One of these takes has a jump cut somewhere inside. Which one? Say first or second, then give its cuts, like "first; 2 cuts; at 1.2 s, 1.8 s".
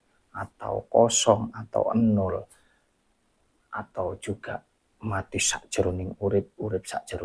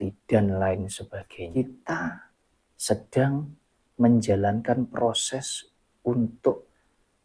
second; 1 cut; at 1.5 s